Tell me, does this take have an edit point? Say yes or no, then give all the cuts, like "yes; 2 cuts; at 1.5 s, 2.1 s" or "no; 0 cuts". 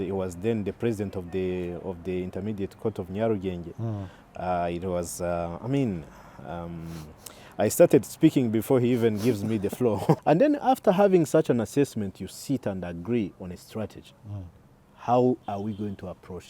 yes; 1 cut; at 10.2 s